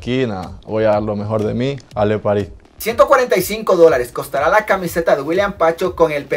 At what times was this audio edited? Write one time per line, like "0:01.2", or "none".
none